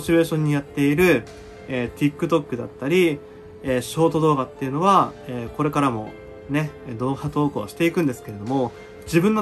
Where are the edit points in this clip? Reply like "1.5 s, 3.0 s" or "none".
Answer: none